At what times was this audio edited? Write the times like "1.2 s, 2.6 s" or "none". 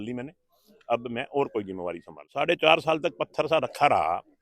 2.3 s